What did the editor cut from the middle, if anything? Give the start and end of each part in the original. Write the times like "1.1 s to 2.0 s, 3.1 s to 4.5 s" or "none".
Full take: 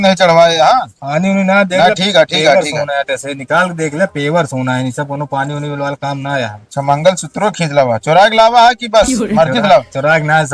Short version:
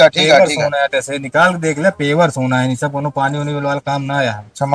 none